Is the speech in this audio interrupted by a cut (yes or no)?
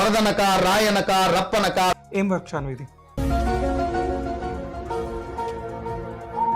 yes